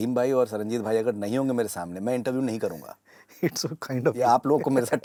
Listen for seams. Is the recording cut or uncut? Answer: uncut